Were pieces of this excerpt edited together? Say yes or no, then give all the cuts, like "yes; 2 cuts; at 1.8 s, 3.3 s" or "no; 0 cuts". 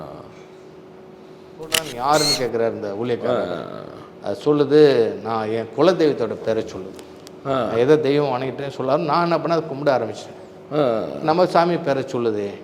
yes; 1 cut; at 1.8 s